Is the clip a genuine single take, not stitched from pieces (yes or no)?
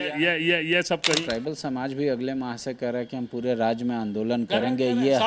no